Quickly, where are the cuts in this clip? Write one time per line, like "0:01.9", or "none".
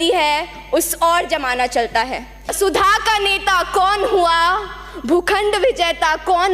0:02.5